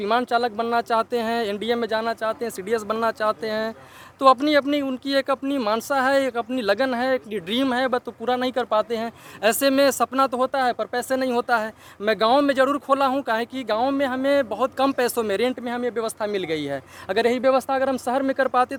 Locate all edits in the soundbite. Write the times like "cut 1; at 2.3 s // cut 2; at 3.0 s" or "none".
none